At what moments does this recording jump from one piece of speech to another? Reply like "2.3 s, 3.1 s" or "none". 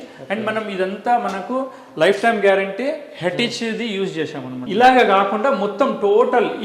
4.6 s